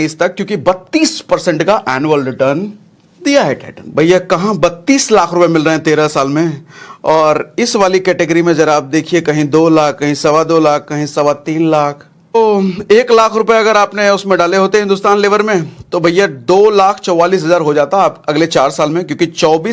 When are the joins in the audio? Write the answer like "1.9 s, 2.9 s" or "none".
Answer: 3.8 s, 12.4 s